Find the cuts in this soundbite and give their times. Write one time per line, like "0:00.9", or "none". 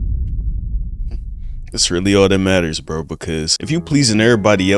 0:03.5

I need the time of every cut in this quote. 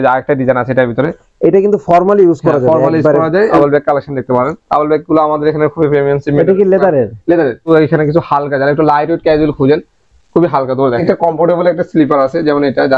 0:03.6
0:07.7
0:11.0

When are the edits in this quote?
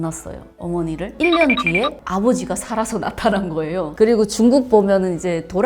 0:01.1
0:03.9

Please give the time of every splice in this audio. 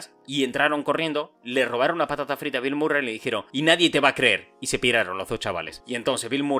0:03.5
0:05.8

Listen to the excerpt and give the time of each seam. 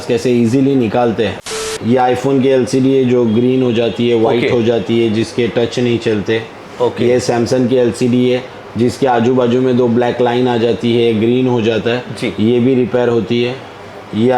0:01.4

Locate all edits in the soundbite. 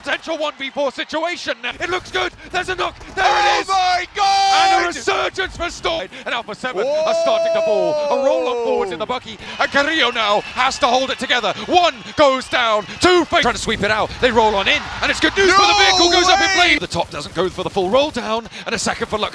0:01.7
0:06.0
0:09.5
0:13.4
0:16.8

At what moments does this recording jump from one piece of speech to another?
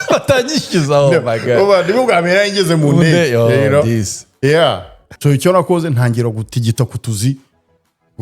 0:05.0

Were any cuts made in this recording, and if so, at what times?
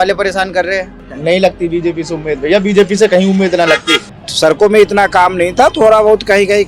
0:01.1
0:04.0

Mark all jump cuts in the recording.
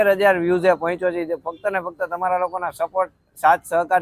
none

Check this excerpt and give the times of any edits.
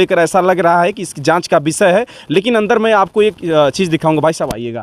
none

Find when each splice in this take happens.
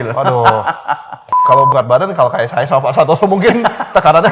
0:01.4

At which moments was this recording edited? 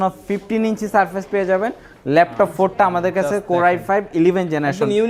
none

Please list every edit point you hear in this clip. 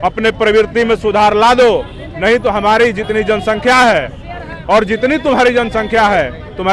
none

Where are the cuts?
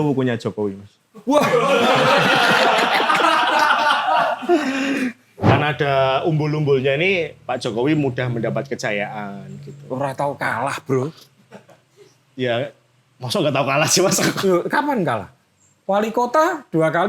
0:05.3

